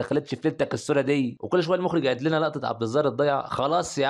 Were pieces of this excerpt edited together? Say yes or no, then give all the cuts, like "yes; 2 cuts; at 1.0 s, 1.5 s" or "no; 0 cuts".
yes; 1 cut; at 1.4 s